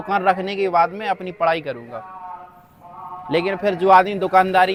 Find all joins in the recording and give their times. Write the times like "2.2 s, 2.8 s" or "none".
none